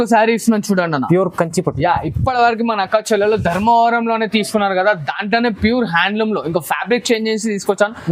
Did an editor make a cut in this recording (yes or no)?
no